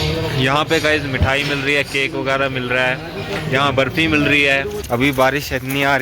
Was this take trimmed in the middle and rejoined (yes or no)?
yes